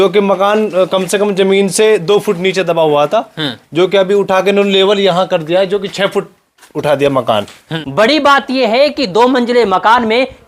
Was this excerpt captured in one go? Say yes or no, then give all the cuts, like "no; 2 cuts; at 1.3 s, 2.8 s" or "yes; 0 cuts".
no; 1 cut; at 7.6 s